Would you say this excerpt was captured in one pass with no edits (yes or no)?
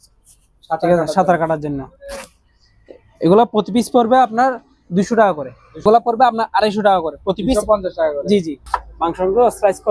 no